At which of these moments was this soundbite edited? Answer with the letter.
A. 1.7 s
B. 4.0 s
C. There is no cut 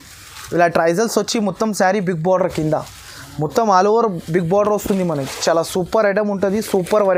C